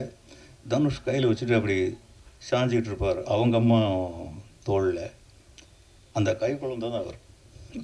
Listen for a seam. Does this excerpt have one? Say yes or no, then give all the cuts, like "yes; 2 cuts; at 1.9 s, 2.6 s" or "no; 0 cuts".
no; 0 cuts